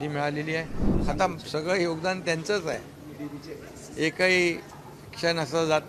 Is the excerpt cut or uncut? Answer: cut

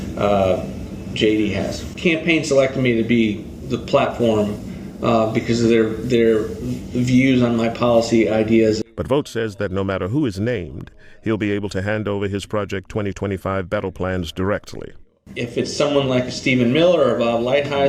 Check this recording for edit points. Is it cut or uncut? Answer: cut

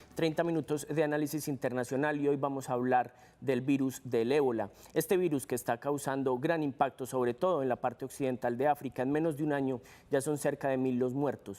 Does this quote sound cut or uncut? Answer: uncut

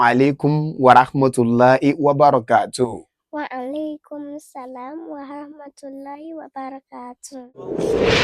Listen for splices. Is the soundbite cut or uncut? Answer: cut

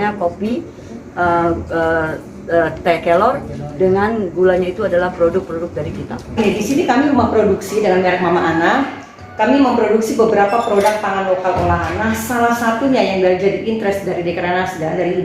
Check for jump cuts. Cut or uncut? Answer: cut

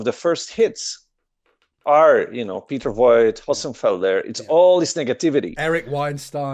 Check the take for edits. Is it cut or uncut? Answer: uncut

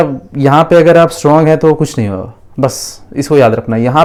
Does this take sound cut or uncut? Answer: uncut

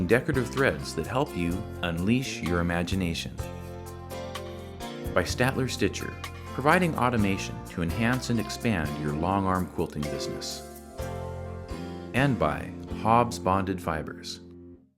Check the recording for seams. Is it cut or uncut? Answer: cut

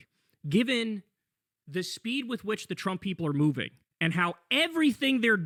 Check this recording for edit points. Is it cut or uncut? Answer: uncut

